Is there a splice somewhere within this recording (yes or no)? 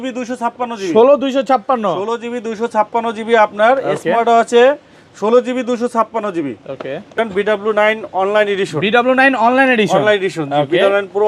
yes